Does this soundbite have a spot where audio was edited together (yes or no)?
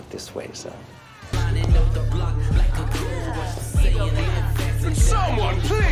yes